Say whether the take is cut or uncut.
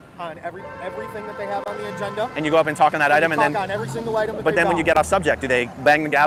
uncut